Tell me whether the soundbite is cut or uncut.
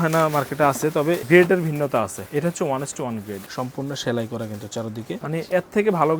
cut